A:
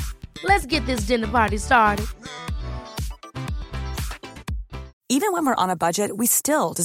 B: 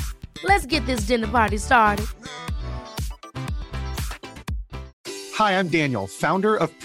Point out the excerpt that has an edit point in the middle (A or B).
A